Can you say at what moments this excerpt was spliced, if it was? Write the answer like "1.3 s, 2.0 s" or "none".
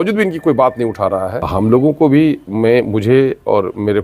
1.5 s

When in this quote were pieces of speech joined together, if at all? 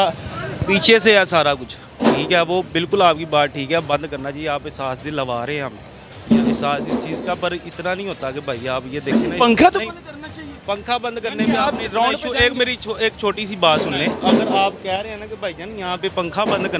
none

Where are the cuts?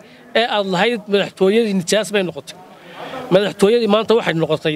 none

